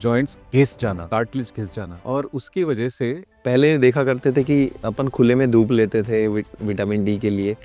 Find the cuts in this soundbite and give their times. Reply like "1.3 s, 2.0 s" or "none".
3.3 s

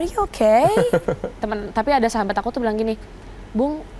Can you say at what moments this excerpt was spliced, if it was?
1.3 s

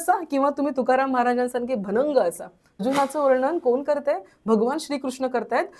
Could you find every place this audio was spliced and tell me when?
2.8 s

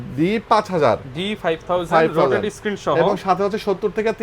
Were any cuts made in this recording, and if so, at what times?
none

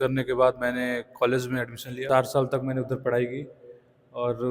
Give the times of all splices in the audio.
2.0 s

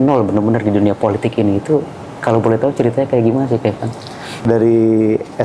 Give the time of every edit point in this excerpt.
4.5 s

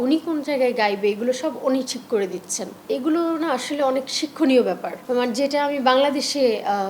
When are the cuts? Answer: 2.8 s

